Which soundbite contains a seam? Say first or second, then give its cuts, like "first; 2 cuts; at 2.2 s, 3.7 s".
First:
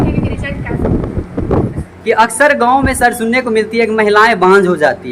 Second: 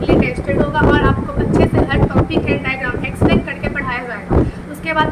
first; 1 cut; at 2.1 s